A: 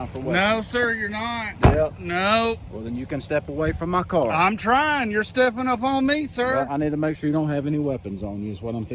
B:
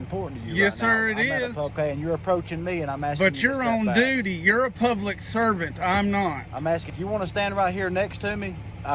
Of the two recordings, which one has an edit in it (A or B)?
B